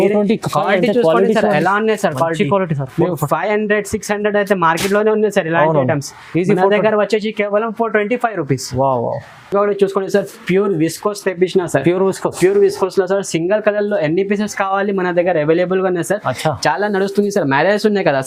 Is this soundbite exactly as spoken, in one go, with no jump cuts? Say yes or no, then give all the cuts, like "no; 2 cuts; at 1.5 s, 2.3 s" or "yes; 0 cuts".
yes; 0 cuts